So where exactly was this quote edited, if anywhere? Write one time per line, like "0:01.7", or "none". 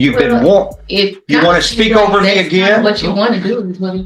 none